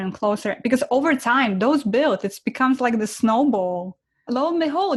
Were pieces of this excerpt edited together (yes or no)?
no